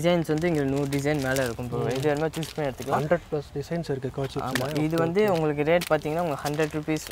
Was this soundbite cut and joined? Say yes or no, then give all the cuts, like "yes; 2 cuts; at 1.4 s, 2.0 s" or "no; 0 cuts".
no; 0 cuts